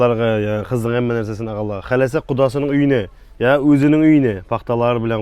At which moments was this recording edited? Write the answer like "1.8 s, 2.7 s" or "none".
none